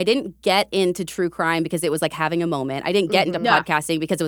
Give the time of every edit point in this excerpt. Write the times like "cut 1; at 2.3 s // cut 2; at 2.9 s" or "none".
none